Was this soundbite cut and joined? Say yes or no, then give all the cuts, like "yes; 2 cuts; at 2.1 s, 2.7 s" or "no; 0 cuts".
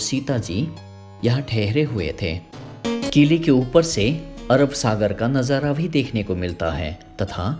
yes; 1 cut; at 2.8 s